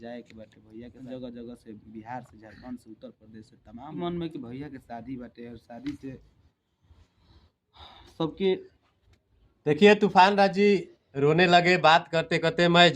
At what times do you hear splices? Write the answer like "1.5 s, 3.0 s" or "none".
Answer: 1.1 s, 4.0 s